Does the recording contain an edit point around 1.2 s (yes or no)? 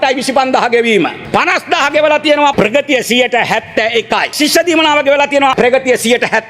yes